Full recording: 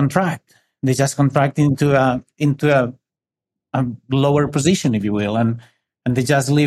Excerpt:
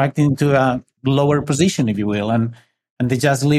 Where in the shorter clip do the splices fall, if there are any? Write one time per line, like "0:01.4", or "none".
0:00.9